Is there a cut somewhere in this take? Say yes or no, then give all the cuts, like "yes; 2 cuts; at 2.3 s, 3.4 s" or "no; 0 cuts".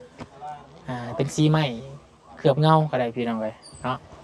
no; 0 cuts